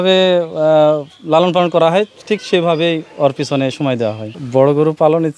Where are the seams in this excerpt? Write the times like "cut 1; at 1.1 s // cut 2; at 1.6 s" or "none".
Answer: cut 1; at 4.3 s